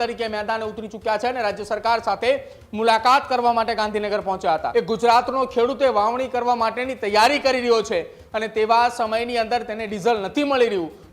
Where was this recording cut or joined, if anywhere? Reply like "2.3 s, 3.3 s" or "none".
4.7 s